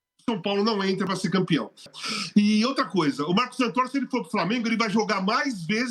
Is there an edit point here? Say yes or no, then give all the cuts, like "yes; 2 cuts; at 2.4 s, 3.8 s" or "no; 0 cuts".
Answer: yes; 1 cut; at 1.9 s